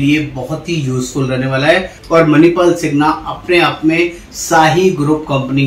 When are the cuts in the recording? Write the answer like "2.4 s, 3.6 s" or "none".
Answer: 1.9 s